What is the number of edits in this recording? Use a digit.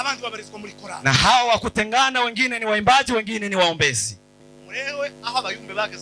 1